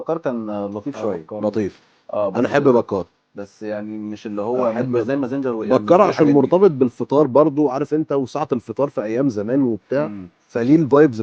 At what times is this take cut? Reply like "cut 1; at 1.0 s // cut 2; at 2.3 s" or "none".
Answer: none